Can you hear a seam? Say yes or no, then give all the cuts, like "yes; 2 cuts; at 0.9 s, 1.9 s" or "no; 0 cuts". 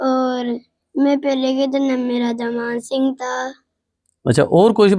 no; 0 cuts